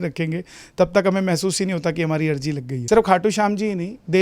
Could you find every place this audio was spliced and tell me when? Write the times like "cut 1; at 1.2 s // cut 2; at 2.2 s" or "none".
cut 1; at 2.7 s